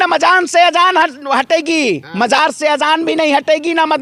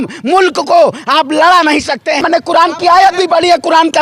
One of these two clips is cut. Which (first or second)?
second